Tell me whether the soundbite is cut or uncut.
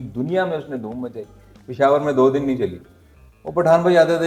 uncut